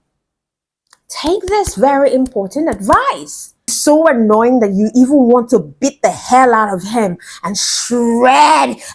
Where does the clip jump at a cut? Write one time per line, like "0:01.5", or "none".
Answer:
0:03.7